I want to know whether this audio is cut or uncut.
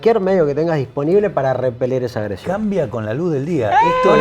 uncut